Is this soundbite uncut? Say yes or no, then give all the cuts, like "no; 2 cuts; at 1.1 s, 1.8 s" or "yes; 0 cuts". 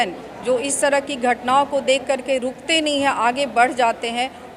yes; 0 cuts